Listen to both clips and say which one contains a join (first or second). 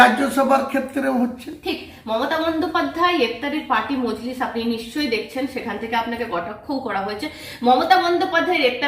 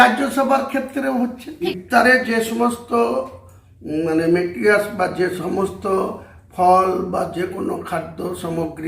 second